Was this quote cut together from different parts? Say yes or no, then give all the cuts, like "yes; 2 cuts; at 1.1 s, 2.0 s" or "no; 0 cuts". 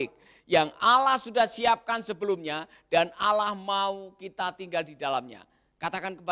no; 0 cuts